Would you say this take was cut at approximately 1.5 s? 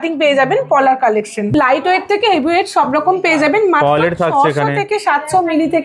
yes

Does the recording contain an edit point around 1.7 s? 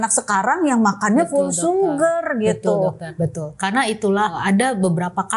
no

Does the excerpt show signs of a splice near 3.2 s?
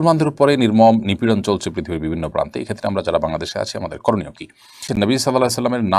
no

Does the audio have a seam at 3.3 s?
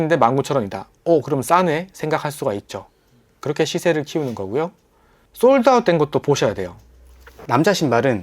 no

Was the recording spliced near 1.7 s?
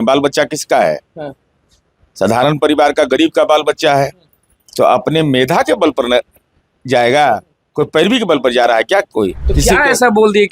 no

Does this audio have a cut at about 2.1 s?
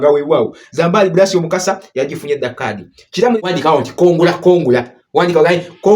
no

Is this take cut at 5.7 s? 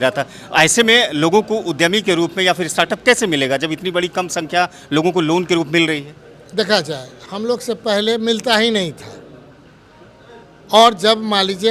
no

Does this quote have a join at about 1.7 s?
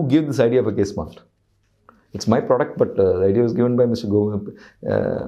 no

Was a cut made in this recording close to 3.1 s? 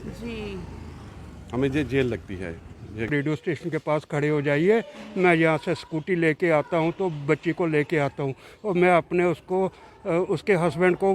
yes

